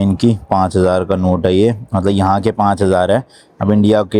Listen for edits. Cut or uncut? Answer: uncut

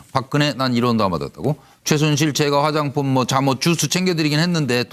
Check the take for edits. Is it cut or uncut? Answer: cut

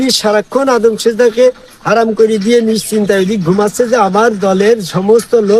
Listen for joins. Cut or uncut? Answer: uncut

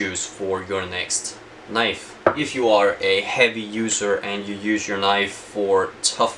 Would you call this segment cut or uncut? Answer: cut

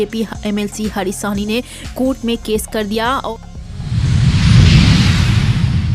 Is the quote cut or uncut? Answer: cut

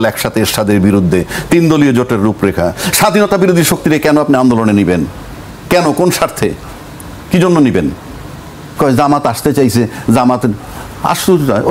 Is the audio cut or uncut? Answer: uncut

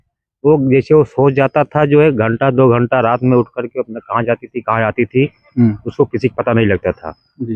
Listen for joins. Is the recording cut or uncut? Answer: uncut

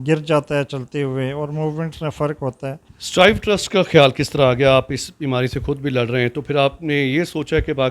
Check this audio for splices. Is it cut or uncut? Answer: cut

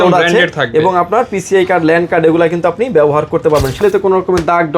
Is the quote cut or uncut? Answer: cut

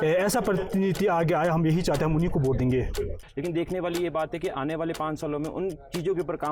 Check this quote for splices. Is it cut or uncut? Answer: cut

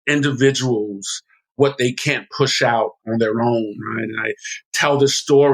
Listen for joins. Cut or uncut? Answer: cut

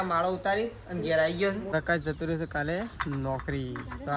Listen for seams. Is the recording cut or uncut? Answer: cut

